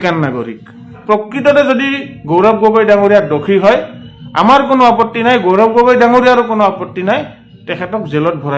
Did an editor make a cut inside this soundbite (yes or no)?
yes